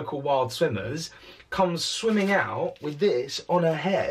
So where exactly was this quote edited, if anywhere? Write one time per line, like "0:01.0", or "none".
none